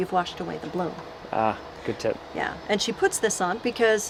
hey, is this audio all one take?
yes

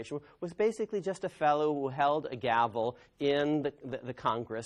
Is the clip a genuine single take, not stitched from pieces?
yes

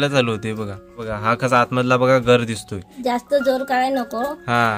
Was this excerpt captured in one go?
no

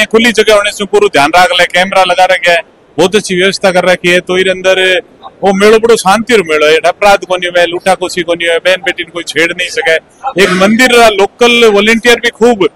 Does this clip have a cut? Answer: no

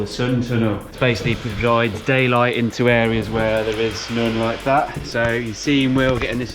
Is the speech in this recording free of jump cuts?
yes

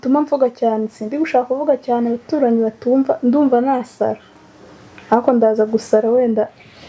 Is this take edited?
no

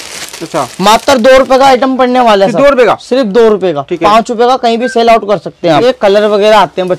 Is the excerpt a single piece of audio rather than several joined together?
no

